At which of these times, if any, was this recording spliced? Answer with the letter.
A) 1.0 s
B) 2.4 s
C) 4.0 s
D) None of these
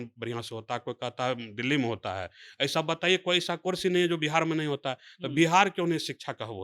D